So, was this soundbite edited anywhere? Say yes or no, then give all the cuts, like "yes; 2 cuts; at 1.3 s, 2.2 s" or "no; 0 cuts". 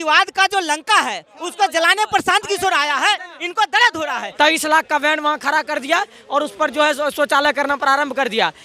yes; 1 cut; at 4.3 s